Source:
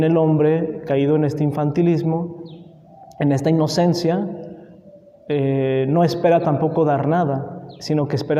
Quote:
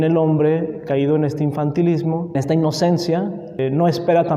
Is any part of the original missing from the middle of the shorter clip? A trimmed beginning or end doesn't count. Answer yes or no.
yes